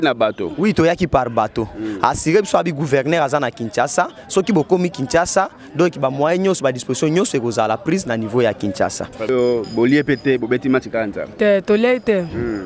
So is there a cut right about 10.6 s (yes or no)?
no